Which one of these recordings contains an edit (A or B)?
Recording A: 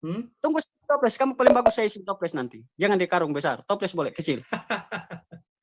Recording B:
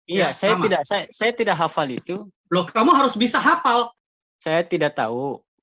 B